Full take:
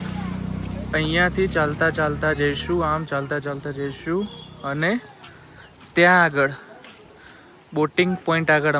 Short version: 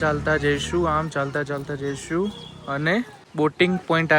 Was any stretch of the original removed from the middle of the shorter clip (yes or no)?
yes